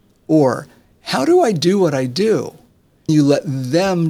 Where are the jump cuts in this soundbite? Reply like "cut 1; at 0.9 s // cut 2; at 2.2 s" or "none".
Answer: cut 1; at 3.1 s